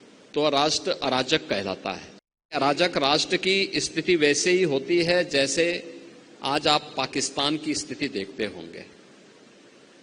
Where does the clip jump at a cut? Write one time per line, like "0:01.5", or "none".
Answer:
0:02.6